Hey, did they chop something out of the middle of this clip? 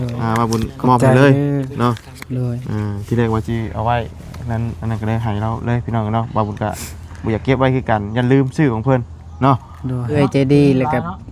yes; 1 cut; at 10.1 s

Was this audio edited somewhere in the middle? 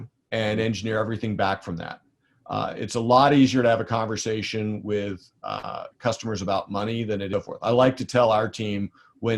yes; 1 cut; at 7.3 s

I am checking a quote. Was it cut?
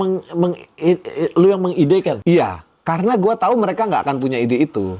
yes; 1 cut; at 2.1 s

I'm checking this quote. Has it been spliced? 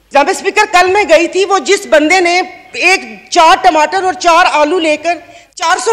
no; 0 cuts

